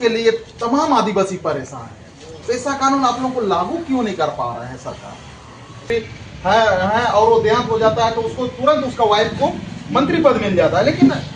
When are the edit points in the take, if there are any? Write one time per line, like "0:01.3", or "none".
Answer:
0:05.8

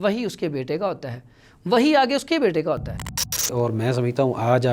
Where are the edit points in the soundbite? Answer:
0:03.4

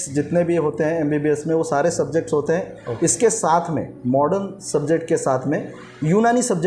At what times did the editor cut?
none

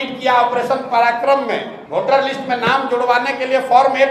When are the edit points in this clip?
0:01.8

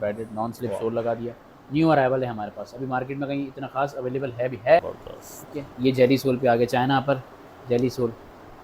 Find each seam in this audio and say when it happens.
0:04.8

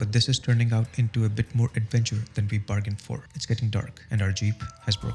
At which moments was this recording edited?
0:03.3
0:04.0

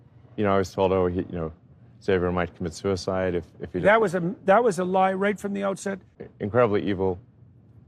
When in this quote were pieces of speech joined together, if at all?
0:06.1

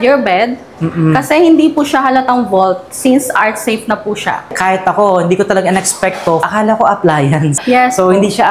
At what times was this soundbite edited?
0:04.5
0:06.4
0:07.6

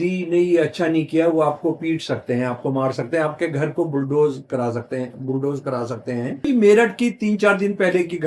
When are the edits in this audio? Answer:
0:06.4

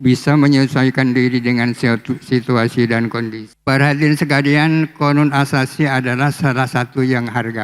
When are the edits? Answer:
0:03.5

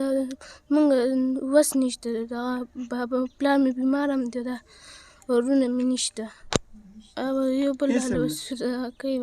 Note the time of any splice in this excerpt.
0:06.4

